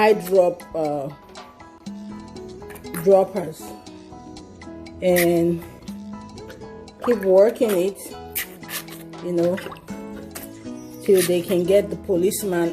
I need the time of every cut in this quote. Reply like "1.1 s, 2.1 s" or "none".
1.1 s, 2.9 s